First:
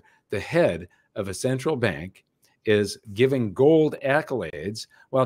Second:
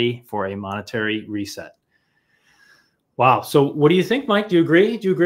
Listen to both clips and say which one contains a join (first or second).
first